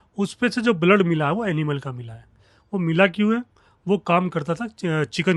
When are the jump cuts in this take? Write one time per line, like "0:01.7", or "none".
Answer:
none